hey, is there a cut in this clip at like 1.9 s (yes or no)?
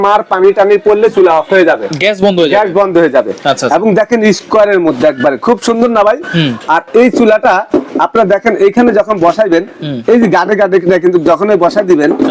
no